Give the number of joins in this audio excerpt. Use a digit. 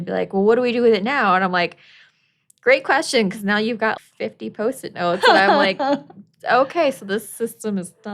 0